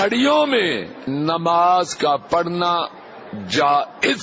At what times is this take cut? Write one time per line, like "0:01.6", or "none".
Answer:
0:01.0